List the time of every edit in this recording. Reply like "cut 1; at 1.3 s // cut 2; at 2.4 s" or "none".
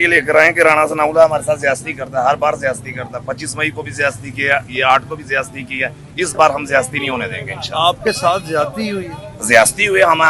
none